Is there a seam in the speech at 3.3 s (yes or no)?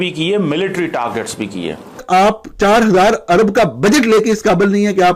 no